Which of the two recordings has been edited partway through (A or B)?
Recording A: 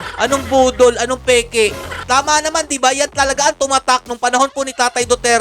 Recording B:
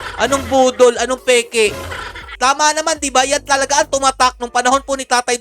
A